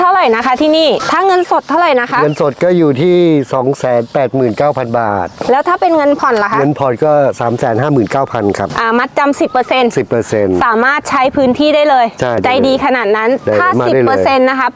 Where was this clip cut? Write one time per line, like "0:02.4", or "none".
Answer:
0:01.0
0:08.7
0:12.4